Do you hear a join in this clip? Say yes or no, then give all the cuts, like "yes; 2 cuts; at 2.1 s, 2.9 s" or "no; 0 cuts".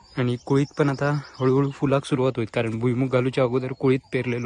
no; 0 cuts